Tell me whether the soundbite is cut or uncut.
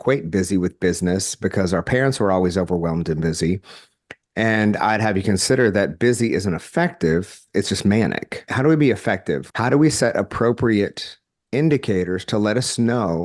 cut